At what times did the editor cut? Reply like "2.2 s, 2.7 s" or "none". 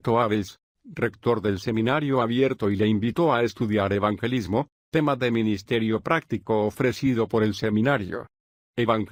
none